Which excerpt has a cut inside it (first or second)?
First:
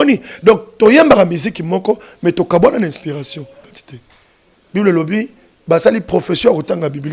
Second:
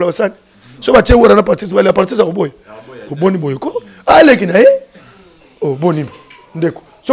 first